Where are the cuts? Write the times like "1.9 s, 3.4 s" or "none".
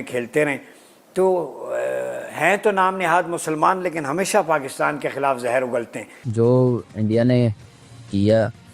6.2 s